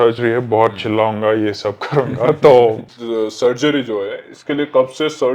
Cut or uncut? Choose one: cut